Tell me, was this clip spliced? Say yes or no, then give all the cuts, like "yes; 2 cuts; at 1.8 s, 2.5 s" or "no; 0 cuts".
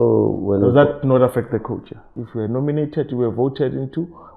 yes; 1 cut; at 2.1 s